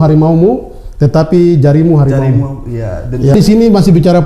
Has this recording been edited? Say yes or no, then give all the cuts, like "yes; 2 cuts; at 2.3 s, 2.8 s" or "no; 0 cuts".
yes; 1 cut; at 3.3 s